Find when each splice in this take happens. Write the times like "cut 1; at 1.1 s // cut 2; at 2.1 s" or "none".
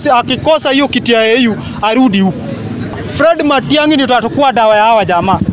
cut 1; at 3.0 s